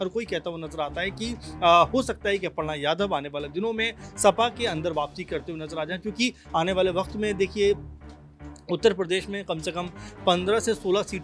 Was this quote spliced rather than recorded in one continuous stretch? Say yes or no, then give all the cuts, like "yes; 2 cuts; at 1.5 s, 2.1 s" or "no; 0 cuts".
no; 0 cuts